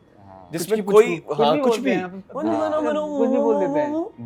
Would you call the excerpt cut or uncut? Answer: uncut